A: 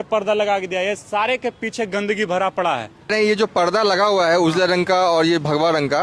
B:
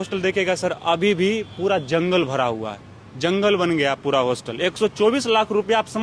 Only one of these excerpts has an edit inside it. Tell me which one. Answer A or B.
A